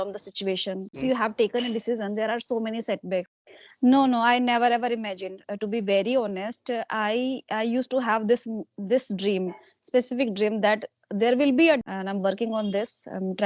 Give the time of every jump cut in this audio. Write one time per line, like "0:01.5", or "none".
0:00.9
0:03.3
0:11.8